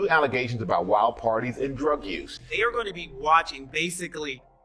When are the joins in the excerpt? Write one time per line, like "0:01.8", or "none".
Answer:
0:02.4